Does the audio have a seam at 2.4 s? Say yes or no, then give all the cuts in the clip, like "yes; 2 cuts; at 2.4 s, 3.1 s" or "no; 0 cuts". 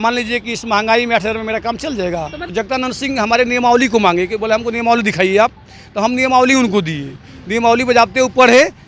yes; 1 cut; at 2.4 s